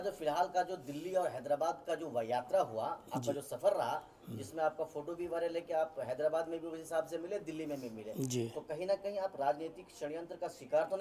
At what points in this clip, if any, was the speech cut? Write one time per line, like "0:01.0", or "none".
none